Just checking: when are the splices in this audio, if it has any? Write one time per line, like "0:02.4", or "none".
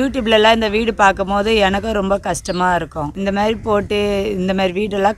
0:03.1